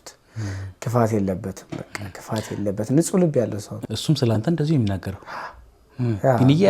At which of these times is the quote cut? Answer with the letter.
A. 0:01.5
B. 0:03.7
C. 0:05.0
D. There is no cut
B